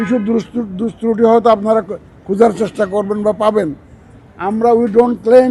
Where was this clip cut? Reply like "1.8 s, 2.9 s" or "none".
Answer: none